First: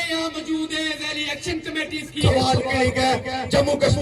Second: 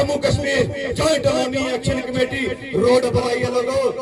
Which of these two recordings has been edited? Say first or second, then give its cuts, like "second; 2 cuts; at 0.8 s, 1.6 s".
first; 1 cut; at 2.2 s